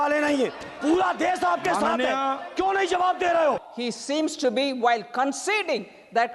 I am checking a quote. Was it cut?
yes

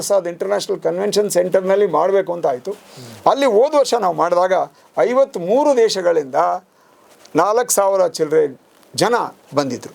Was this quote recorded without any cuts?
yes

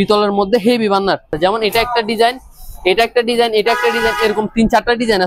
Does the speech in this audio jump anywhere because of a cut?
yes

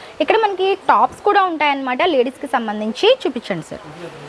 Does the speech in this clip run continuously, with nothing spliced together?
yes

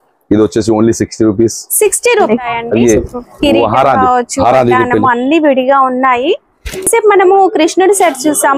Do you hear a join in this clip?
yes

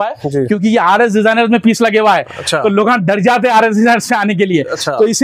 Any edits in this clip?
no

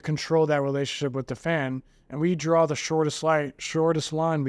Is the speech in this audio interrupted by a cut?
no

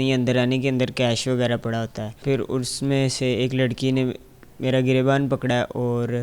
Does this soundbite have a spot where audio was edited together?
yes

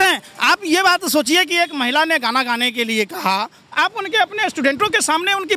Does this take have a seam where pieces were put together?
no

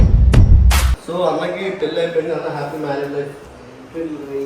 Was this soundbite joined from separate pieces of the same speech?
yes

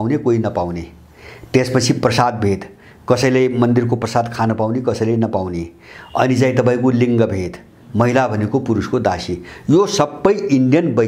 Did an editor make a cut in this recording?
no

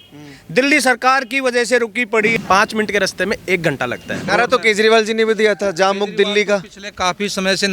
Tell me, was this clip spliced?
yes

